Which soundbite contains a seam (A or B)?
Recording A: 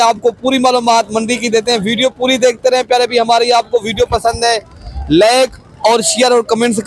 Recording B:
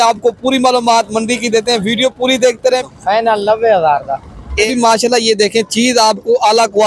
B